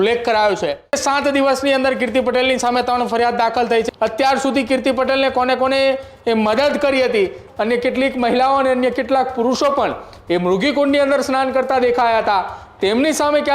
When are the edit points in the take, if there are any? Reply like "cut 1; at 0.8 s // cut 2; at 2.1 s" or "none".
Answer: cut 1; at 1.0 s // cut 2; at 3.9 s // cut 3; at 7.4 s